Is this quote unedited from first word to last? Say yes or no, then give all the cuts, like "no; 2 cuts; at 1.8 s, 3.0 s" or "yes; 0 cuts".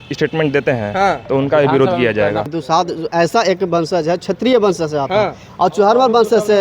no; 1 cut; at 2.5 s